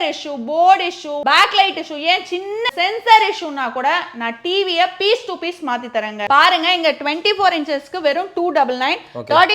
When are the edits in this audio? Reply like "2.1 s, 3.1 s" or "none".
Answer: 1.1 s, 2.7 s, 6.2 s

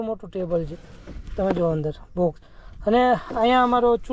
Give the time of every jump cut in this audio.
none

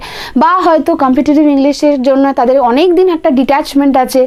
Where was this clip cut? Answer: none

